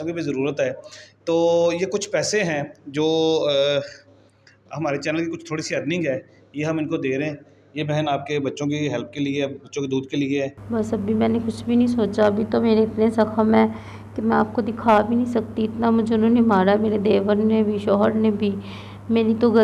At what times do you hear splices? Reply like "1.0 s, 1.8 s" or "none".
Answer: 10.6 s